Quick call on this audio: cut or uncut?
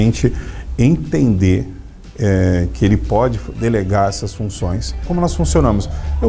cut